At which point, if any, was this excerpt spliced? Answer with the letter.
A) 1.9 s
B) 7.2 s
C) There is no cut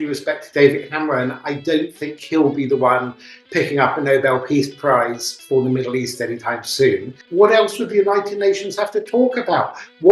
B